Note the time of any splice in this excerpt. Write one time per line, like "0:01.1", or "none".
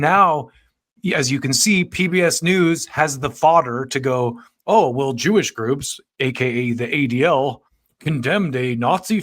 none